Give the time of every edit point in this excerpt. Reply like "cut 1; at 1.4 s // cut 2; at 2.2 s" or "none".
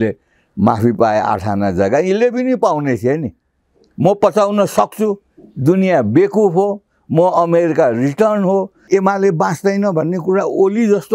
cut 1; at 8.8 s